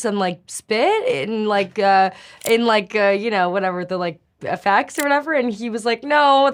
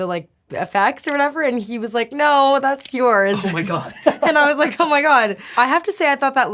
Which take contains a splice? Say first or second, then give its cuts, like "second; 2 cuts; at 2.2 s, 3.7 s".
second; 1 cut; at 5.5 s